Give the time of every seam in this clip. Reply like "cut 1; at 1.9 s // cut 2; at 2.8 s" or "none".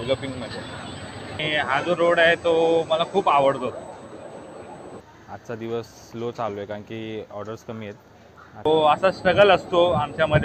cut 1; at 1.4 s // cut 2; at 5.0 s // cut 3; at 8.7 s